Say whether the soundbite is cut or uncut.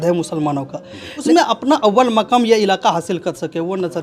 cut